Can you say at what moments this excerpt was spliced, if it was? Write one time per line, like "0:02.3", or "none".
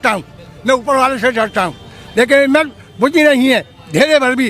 none